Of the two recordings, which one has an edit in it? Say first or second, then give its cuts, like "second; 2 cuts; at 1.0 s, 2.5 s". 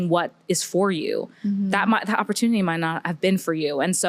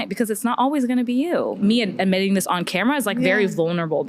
second; 1 cut; at 1.6 s